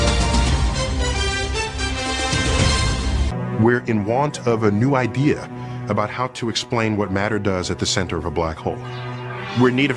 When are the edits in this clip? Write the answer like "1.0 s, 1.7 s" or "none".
7.8 s